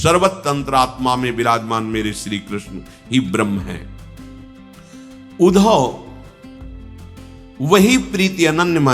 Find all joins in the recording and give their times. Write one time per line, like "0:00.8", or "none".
0:03.8
0:05.4
0:06.0
0:07.6

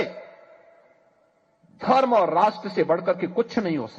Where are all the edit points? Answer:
0:02.9

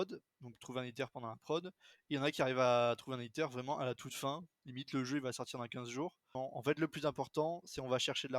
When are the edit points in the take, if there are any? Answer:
0:06.3

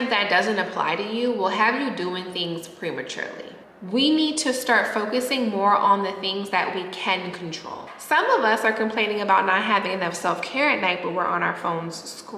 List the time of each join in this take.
0:03.9
0:08.1

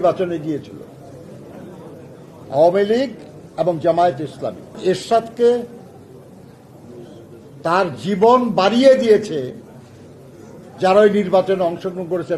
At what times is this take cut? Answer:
0:04.8

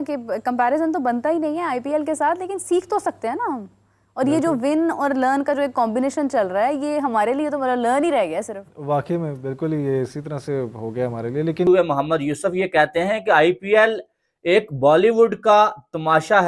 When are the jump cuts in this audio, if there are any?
0:11.7

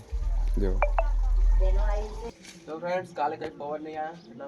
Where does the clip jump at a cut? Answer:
0:02.3

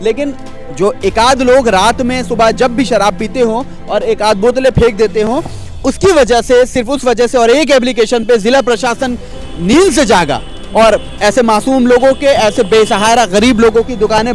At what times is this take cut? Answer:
none

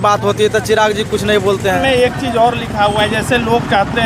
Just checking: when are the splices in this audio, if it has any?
0:01.8

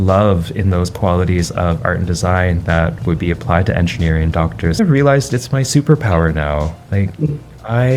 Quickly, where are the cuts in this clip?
0:04.7

